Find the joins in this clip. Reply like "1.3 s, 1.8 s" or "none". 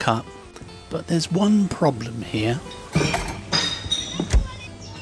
none